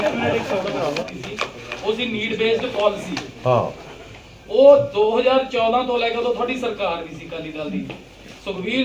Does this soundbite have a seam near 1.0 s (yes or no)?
yes